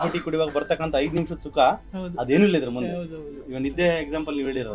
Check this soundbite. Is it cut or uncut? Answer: uncut